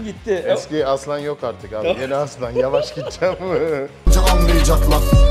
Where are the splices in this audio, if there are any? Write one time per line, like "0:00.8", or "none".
none